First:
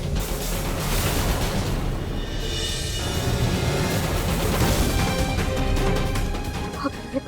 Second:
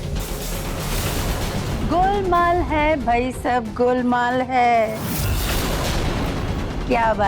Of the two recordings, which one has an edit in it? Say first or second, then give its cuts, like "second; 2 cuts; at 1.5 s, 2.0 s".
second; 1 cut; at 1.7 s